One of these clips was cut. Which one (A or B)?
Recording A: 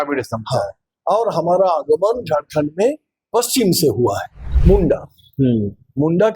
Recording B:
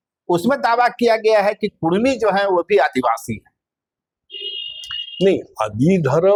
A